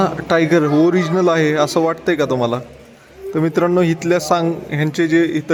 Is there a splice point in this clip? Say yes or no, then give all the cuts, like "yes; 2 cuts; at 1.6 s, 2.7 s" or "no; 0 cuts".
no; 0 cuts